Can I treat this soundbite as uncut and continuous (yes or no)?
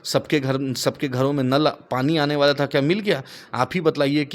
yes